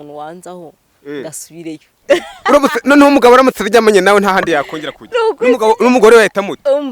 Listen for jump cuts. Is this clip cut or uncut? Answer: uncut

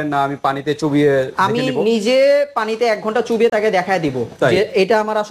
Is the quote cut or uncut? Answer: uncut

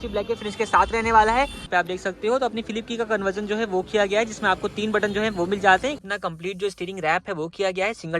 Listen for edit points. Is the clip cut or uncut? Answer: cut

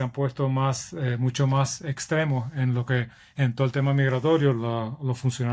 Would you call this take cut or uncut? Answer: uncut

